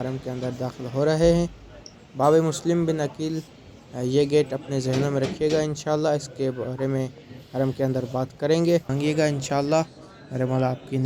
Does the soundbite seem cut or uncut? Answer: cut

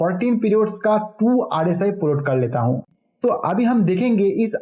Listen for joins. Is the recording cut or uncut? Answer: cut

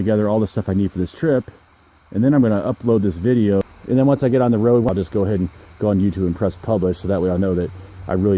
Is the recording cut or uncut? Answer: cut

